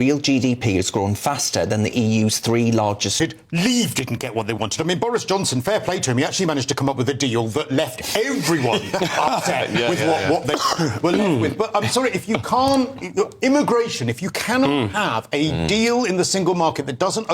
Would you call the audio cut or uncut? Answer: cut